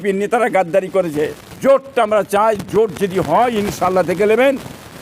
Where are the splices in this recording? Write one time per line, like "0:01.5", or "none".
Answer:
0:01.4